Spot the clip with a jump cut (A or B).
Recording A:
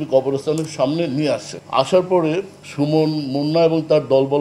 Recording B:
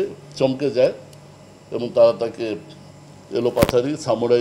A